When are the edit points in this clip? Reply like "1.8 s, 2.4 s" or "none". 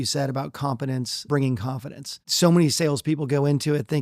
1.2 s, 2.3 s